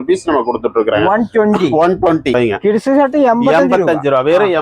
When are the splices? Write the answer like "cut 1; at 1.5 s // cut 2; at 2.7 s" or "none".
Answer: cut 1; at 2.3 s